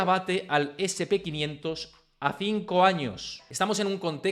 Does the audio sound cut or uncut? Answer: cut